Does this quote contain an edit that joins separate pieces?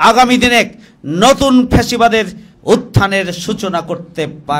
yes; 1 cut; at 2.4 s

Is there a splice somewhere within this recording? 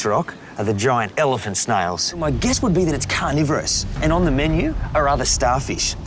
yes; 1 cut; at 2.1 s

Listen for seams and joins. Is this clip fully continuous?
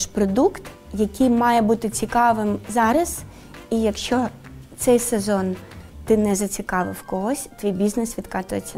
yes; 0 cuts

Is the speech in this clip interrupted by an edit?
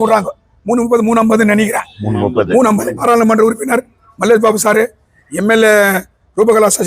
yes; 1 cut; at 3.0 s

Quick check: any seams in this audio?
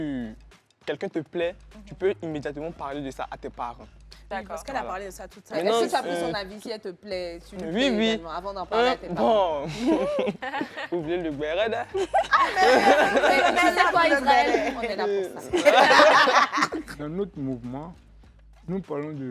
yes; 1 cut; at 16.9 s

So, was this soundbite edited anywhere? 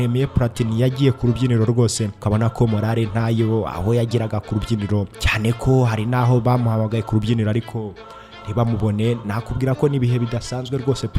yes; 2 cuts; at 2.1 s, 5.2 s

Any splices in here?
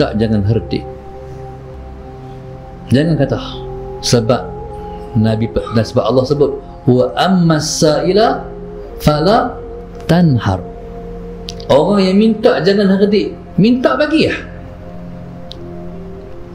no; 0 cuts

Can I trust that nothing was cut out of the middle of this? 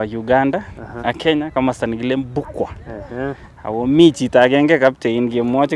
yes; 0 cuts

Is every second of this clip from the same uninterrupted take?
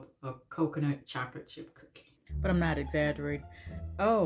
no; 1 cut; at 2.2 s

